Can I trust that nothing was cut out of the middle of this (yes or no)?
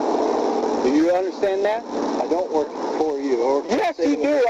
no